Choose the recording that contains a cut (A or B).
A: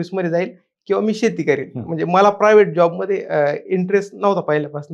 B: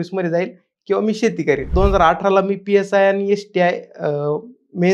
B